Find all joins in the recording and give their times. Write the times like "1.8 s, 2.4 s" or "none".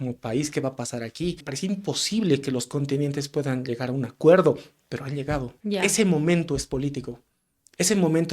1.5 s, 5.5 s